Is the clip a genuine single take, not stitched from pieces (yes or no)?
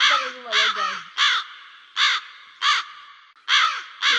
yes